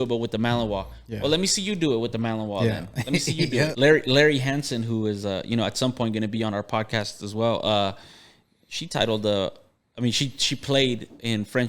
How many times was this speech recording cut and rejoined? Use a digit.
1